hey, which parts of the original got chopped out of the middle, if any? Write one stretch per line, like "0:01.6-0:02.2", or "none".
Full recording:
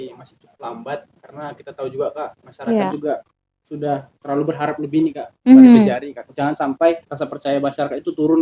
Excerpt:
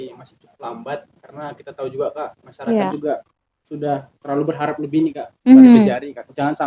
none

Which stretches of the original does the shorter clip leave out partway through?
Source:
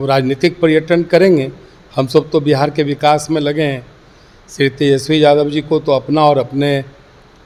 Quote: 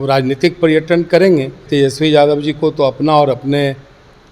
0:01.7-0:04.7

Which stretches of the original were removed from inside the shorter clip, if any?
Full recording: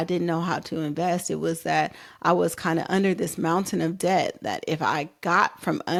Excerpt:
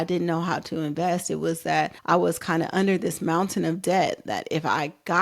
0:02.0-0:02.1

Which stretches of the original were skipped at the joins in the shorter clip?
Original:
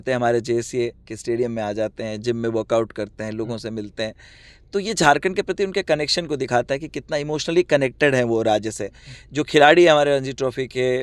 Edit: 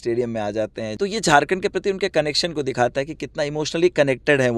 0:02.1-0:04.7

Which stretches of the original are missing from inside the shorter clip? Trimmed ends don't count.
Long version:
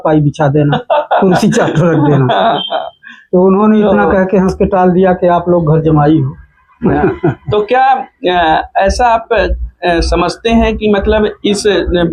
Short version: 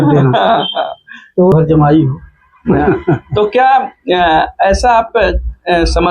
0:03.5-0:05.7

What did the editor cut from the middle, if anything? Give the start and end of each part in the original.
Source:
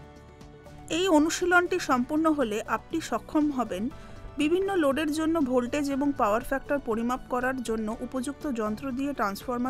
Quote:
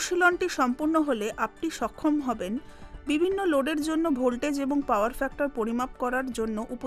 none

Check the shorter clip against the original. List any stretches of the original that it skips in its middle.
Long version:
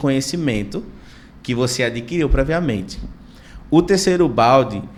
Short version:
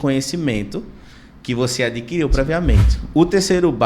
0:03.0-0:03.5

